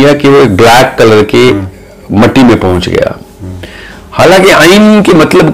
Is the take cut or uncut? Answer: uncut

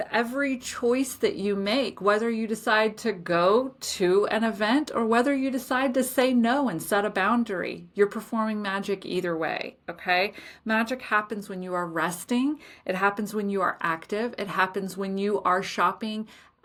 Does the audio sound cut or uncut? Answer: uncut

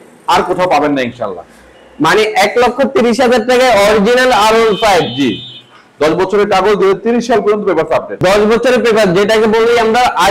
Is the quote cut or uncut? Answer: uncut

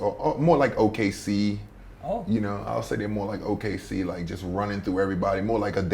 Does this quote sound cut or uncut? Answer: uncut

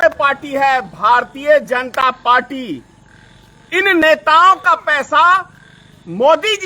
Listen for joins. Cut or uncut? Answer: uncut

